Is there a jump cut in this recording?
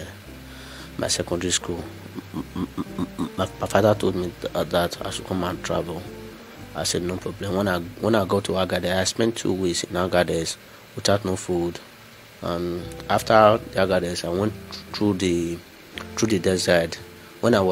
no; 0 cuts

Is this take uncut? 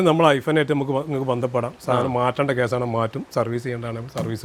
yes; 0 cuts

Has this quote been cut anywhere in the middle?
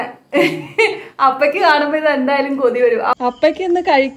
yes; 1 cut; at 3.2 s

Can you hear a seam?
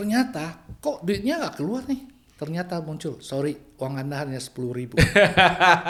no; 0 cuts

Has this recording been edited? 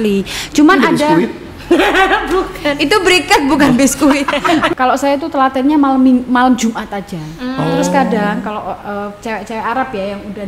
yes; 1 cut; at 4.7 s

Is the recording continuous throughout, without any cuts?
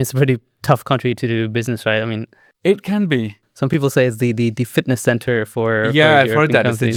yes; 0 cuts

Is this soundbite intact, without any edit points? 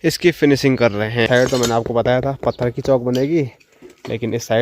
no; 1 cut; at 1.3 s

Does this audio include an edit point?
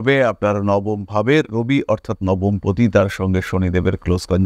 no; 0 cuts

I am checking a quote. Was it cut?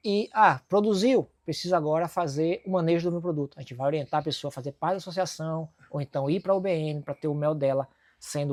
no; 0 cuts

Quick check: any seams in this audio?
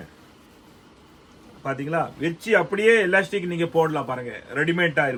no; 0 cuts

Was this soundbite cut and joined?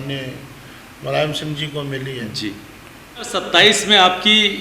yes; 1 cut; at 3.3 s

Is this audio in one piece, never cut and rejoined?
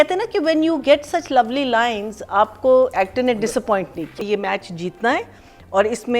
no; 1 cut; at 4.2 s

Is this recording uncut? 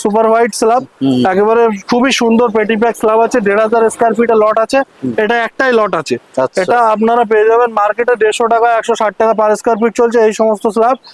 yes; 0 cuts

